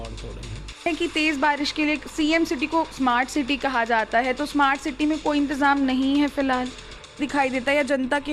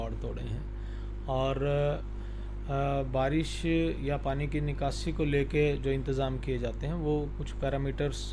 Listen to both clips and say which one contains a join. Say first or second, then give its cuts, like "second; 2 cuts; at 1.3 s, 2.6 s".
first; 2 cuts; at 0.9 s, 7.2 s